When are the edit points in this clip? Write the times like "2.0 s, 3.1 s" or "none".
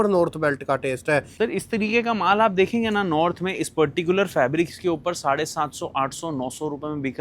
1.3 s